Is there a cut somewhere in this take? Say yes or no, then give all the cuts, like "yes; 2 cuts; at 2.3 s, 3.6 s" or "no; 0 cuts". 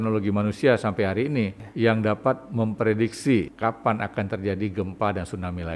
yes; 2 cuts; at 1.6 s, 3.5 s